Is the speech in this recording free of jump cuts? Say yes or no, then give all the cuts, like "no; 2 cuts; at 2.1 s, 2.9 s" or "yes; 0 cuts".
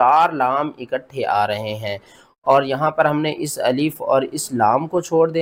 yes; 0 cuts